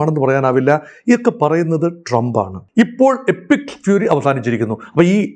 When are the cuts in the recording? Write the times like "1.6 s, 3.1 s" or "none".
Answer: 2.6 s